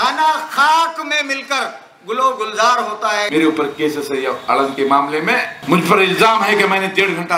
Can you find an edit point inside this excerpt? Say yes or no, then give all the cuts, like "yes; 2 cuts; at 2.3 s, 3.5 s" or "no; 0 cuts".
yes; 2 cuts; at 3.3 s, 5.5 s